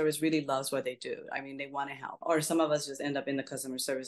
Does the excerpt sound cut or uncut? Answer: cut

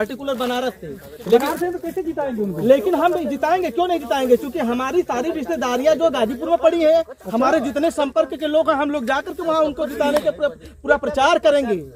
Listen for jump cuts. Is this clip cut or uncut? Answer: uncut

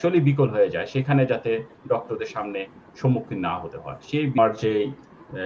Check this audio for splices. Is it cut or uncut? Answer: cut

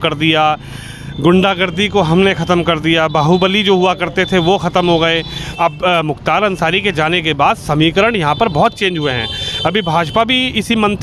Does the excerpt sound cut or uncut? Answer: cut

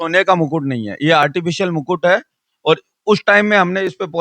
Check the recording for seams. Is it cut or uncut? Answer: uncut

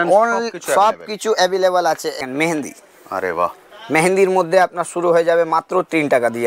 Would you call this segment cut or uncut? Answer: cut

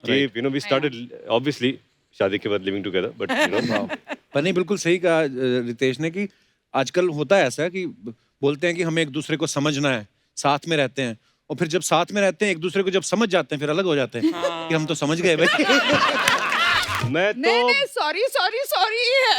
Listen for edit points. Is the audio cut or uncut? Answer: cut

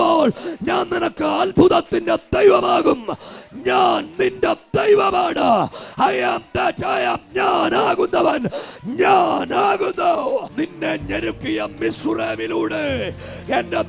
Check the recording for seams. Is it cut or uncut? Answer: cut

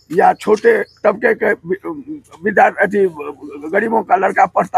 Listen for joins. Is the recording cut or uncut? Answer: uncut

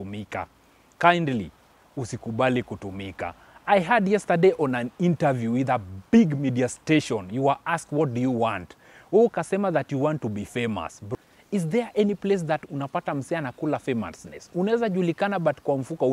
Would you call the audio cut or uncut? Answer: cut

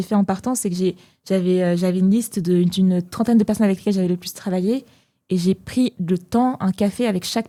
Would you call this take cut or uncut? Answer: uncut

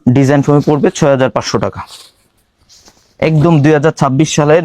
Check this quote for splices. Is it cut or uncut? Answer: uncut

